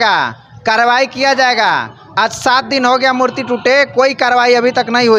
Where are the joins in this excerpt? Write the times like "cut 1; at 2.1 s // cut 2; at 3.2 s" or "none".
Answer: none